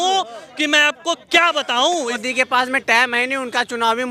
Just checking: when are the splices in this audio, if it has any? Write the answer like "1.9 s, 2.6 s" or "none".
2.2 s